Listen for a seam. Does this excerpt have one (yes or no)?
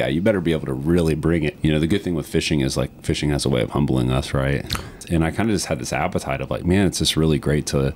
yes